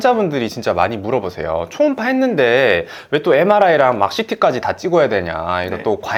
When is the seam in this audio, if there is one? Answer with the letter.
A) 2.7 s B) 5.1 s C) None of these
C